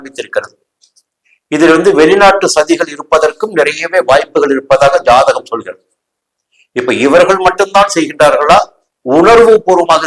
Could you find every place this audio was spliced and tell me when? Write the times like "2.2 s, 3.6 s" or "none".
none